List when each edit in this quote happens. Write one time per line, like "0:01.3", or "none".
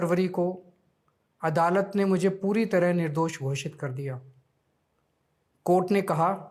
none